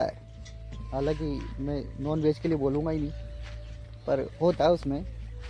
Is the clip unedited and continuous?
yes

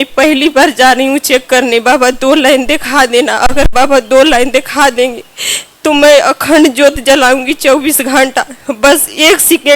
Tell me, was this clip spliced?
no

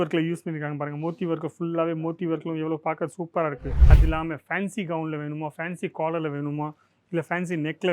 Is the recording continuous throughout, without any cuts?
no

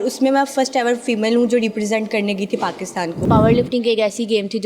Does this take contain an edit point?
yes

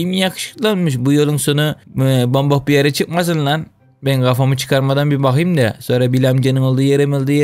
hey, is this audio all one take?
yes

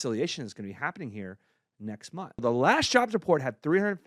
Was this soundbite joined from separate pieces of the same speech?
yes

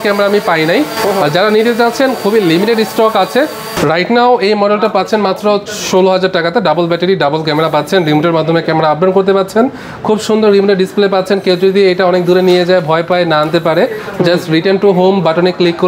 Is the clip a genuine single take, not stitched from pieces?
yes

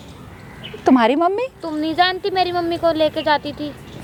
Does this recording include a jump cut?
no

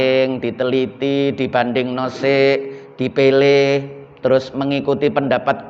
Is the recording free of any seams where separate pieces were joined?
yes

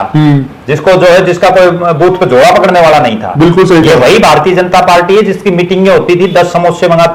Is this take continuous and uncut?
yes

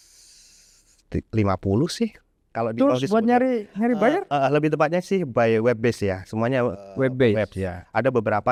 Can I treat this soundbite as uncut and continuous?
yes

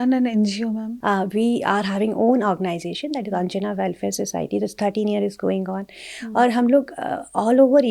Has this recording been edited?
yes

